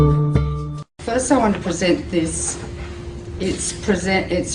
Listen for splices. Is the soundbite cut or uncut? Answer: cut